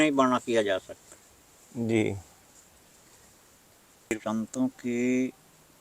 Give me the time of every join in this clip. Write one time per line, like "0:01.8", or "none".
0:04.2